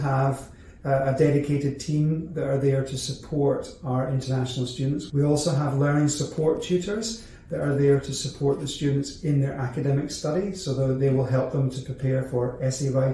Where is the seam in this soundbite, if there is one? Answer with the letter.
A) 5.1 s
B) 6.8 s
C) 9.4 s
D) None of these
A